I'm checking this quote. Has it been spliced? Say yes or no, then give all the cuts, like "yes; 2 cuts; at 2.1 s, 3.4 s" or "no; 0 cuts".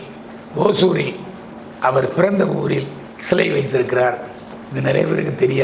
no; 0 cuts